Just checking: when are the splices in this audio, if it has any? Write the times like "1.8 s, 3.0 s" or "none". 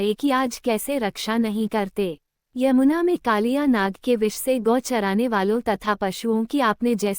1.0 s, 2.3 s